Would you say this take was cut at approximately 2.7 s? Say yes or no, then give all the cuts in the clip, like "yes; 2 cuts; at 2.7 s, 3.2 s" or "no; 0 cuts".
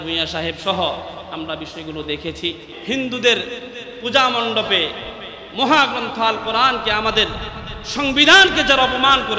yes; 1 cut; at 2.7 s